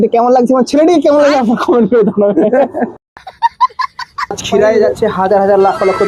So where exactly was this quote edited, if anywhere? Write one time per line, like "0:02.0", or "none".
0:03.0
0:04.4